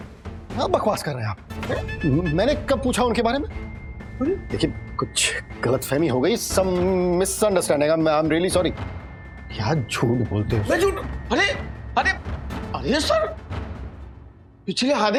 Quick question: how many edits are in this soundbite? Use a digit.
0